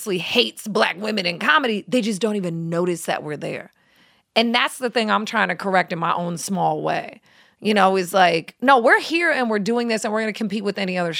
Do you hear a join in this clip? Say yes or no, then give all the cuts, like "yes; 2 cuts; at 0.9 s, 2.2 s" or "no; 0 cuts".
no; 0 cuts